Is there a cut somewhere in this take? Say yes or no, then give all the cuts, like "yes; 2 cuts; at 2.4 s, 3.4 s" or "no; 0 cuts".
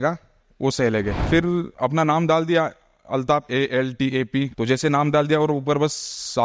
yes; 2 cuts; at 1.6 s, 4.5 s